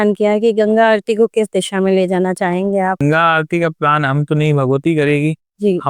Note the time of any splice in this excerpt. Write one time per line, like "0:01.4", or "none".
0:03.0